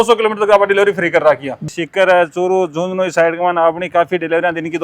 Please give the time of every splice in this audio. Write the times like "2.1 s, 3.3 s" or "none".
1.6 s